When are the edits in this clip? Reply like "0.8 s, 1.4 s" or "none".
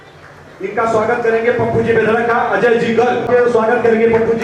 3.2 s